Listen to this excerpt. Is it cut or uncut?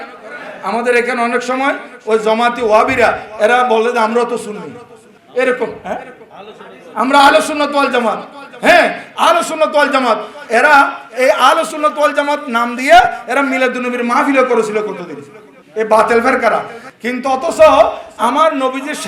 uncut